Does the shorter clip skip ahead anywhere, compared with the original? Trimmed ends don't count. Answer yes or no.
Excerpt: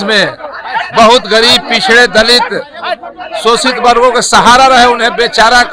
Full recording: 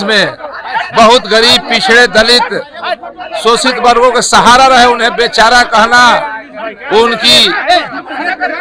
no